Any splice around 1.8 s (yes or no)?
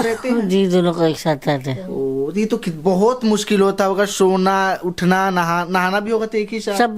no